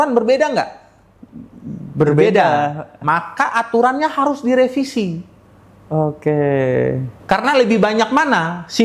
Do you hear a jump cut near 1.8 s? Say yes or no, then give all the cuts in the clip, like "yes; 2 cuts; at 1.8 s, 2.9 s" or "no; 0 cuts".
no; 0 cuts